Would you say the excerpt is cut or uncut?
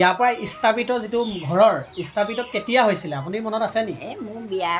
uncut